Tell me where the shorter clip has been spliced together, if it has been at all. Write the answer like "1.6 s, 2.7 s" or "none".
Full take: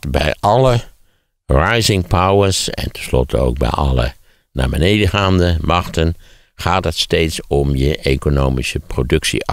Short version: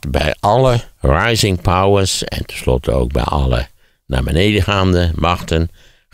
0.9 s